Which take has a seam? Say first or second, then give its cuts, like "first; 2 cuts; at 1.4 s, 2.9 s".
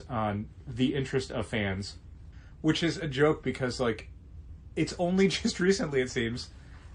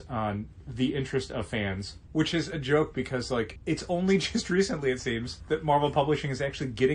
second; 3 cuts; at 1.9 s, 3.5 s, 5.3 s